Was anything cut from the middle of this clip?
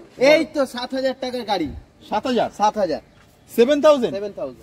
no; 0 cuts

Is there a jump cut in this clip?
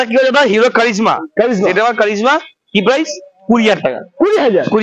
no; 0 cuts

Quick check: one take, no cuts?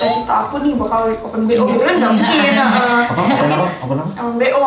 yes; 0 cuts

